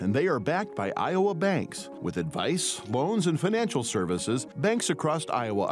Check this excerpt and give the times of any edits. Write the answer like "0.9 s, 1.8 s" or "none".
none